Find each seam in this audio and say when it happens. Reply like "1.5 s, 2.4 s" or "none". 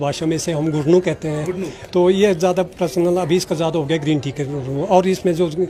none